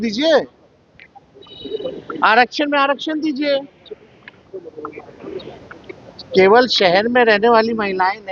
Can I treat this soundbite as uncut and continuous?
yes; 0 cuts

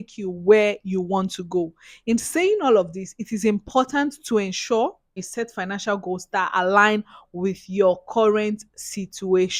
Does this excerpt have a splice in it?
no; 0 cuts

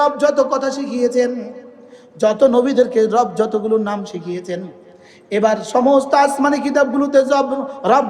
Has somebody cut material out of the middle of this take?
no; 0 cuts

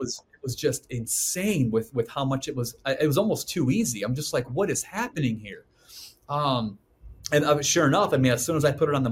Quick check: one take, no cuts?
yes; 0 cuts

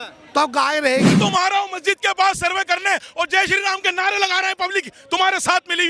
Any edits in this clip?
yes; 1 cut; at 1.2 s

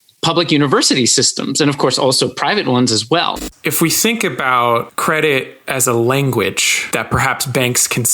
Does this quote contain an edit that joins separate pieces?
yes; 3 cuts; at 3.5 s, 4.9 s, 6.7 s

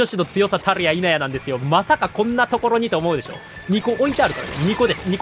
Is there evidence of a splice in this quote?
no; 0 cuts

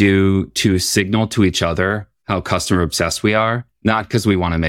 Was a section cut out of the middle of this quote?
yes; 2 cuts; at 2.1 s, 3.7 s

